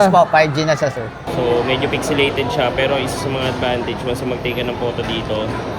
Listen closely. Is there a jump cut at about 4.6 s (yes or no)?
no